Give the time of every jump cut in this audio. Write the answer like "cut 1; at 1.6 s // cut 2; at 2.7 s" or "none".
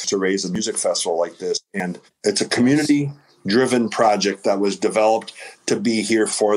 cut 1; at 2.0 s